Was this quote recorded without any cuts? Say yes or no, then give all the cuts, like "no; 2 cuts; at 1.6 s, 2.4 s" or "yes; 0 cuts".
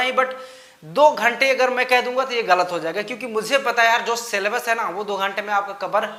yes; 0 cuts